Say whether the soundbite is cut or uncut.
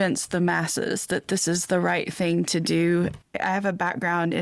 cut